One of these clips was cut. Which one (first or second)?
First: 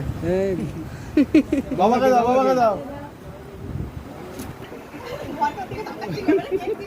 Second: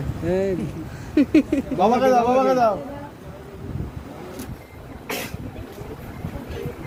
first